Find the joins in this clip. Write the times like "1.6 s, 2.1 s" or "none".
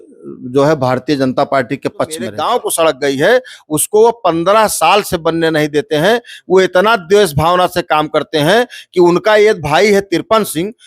2.3 s